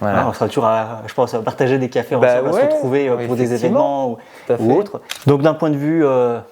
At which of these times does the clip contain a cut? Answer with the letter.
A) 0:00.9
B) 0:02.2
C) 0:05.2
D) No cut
C